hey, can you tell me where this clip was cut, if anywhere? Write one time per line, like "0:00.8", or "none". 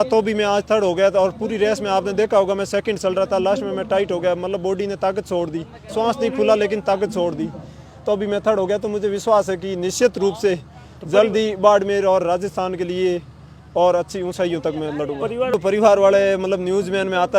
0:15.5